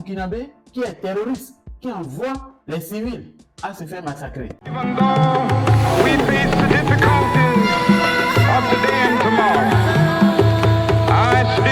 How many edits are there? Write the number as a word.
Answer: one